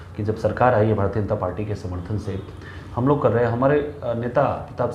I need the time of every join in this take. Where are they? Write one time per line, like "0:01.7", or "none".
none